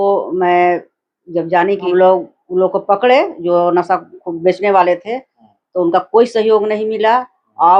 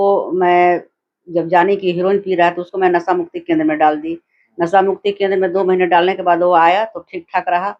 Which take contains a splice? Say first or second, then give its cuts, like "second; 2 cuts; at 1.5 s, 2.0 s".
first; 1 cut; at 1.8 s